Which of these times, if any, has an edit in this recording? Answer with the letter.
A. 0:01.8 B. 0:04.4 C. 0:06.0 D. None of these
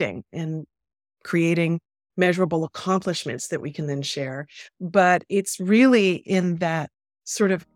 D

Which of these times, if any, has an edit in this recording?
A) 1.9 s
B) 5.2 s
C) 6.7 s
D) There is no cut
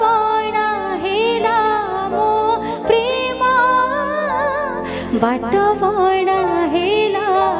D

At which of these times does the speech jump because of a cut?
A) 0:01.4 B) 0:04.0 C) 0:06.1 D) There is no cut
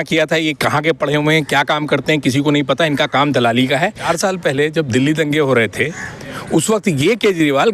B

